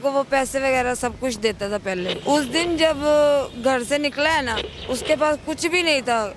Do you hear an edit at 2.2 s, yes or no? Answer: yes